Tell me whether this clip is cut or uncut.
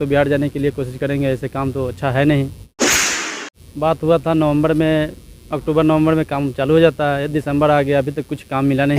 cut